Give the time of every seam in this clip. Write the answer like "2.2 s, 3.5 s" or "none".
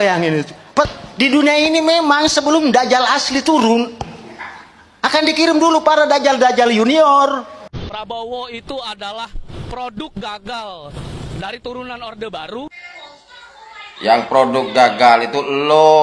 0.8 s, 7.6 s